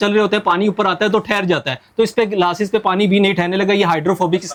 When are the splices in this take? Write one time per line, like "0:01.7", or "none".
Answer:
none